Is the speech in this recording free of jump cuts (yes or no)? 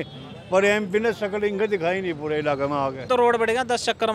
no